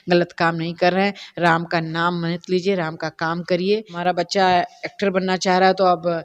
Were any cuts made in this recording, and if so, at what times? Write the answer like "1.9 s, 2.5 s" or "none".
3.9 s